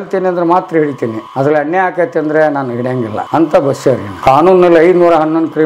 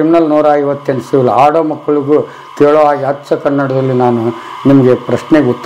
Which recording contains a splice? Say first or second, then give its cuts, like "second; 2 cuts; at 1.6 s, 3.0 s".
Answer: first; 3 cuts; at 1.2 s, 3.2 s, 4.1 s